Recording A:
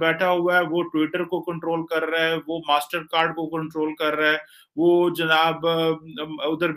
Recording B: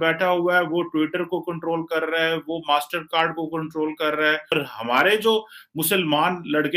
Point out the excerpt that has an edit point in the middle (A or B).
B